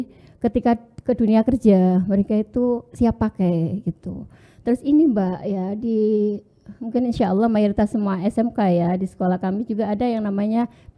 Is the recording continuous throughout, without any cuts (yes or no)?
yes